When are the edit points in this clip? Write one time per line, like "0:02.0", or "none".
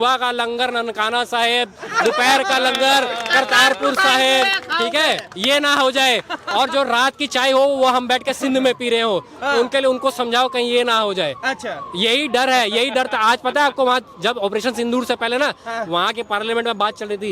none